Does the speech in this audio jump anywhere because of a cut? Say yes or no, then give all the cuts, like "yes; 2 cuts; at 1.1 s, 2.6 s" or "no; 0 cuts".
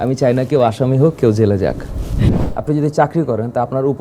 yes; 1 cut; at 2.4 s